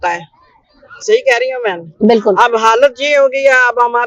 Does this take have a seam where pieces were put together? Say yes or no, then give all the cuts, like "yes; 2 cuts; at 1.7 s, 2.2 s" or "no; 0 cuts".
no; 0 cuts